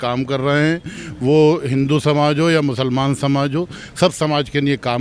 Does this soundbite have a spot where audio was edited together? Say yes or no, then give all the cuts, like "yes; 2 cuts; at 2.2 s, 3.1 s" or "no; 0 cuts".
no; 0 cuts